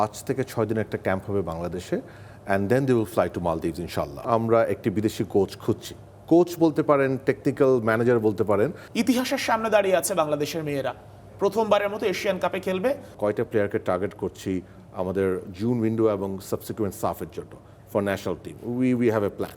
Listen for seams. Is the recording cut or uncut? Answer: cut